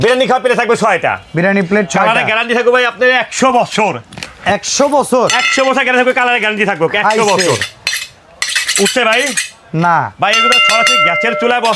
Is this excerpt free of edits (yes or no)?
yes